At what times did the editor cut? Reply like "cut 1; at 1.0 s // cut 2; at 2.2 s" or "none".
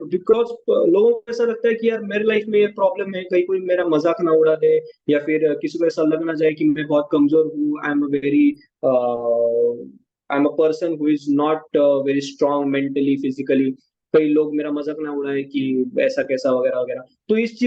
none